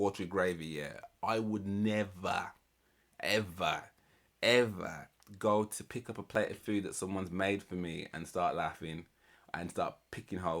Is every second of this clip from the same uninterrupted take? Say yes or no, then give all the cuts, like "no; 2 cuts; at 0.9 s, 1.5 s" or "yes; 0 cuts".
yes; 0 cuts